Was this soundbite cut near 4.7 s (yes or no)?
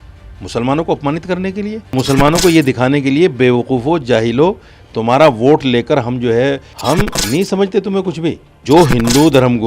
no